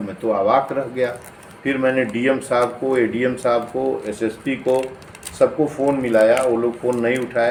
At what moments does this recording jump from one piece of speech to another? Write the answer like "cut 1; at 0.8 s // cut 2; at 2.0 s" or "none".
none